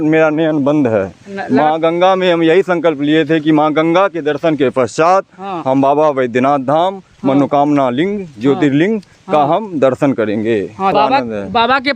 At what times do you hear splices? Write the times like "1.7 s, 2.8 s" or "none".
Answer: 10.9 s